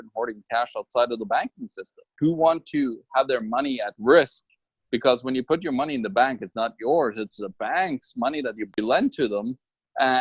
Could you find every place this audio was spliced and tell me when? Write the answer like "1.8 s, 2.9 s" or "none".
2.1 s